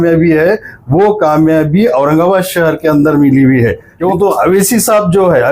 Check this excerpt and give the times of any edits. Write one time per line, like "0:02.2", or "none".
0:03.9